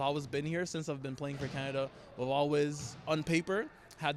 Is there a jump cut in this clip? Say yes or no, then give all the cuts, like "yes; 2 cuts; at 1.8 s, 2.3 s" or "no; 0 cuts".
no; 0 cuts